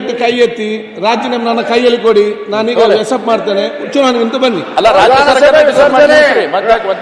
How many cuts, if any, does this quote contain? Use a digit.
0